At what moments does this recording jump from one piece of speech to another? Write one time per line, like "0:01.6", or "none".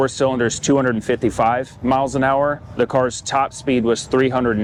none